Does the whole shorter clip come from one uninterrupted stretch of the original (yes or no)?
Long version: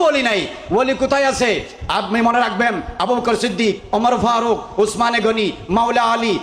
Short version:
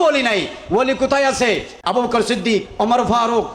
no